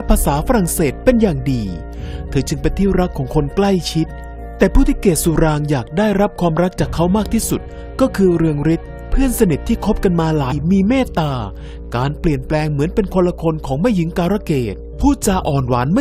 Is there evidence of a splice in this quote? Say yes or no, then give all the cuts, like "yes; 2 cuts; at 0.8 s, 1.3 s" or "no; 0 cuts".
no; 0 cuts